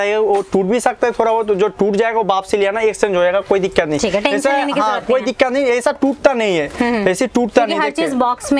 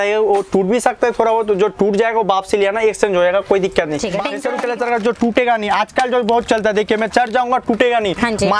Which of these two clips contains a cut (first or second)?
second